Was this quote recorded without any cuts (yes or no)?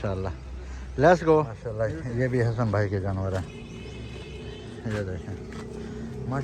no